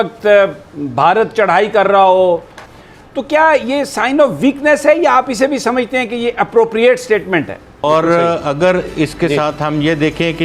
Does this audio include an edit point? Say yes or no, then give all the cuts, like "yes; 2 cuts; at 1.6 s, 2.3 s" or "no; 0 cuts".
yes; 2 cuts; at 2.6 s, 7.8 s